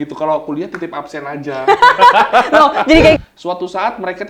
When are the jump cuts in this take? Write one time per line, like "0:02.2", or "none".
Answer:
0:03.2